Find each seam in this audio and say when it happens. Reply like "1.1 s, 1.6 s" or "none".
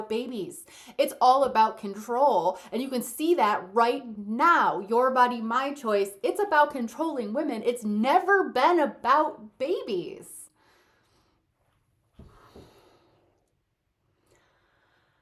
none

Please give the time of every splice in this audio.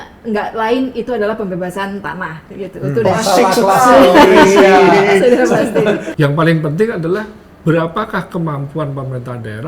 6.1 s

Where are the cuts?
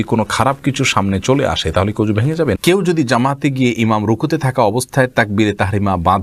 2.6 s

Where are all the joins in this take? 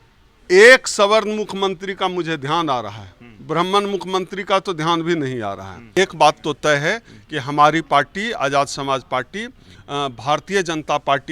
5.9 s

